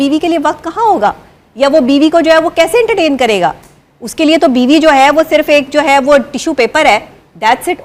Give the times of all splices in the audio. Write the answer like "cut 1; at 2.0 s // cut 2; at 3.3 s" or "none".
none